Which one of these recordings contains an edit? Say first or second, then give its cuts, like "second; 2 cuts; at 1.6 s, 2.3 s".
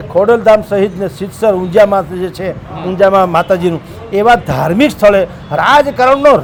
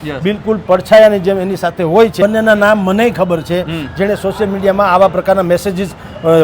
second; 1 cut; at 2.1 s